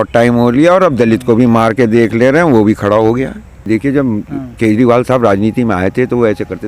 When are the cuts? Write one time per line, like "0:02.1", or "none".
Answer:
0:03.7